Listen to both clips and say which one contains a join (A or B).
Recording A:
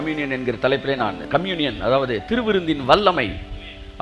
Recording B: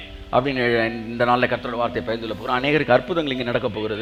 A